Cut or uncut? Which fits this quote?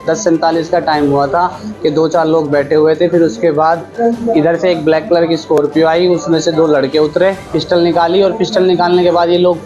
cut